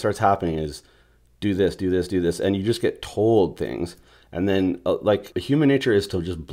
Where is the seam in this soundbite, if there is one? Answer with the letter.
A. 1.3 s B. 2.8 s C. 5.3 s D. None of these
C